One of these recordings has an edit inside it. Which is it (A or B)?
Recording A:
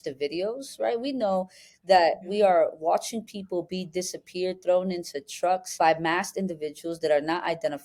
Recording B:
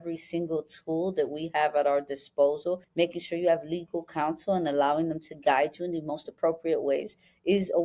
B